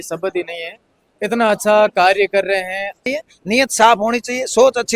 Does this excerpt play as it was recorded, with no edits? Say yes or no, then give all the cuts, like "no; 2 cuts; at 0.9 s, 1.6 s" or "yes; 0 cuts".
no; 1 cut; at 3.0 s